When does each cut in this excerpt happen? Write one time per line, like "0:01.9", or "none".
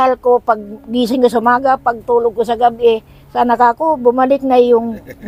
none